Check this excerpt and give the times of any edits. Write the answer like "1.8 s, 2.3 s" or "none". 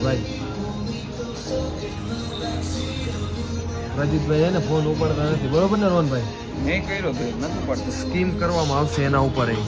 none